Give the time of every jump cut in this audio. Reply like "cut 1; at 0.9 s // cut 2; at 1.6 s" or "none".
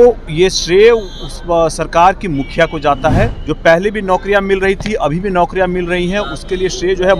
cut 1; at 3.4 s